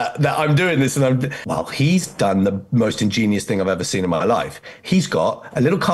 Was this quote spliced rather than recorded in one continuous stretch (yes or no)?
yes